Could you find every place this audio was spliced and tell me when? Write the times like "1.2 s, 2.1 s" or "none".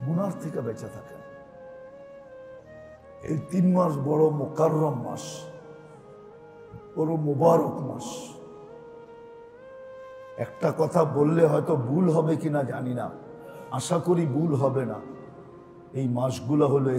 1.5 s, 3.3 s